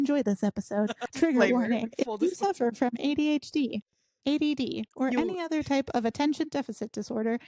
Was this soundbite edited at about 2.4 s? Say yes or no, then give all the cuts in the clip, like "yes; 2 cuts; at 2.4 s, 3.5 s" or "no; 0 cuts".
no; 1 cut; at 1.0 s